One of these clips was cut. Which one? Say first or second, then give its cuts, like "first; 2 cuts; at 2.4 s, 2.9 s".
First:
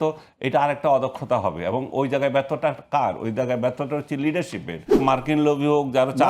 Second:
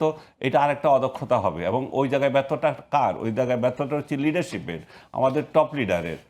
first; 1 cut; at 5.0 s